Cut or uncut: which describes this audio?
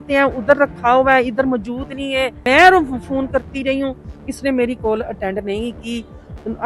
cut